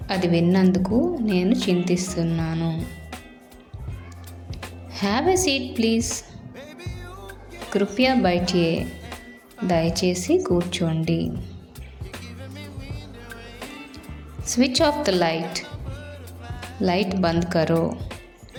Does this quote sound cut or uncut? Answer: uncut